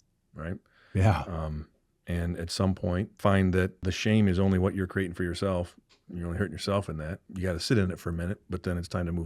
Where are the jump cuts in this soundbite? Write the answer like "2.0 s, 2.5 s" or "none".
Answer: 3.2 s, 3.8 s, 7.2 s